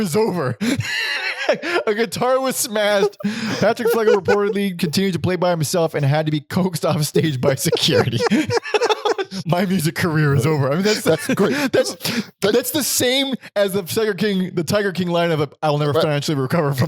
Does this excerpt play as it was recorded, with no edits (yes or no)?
no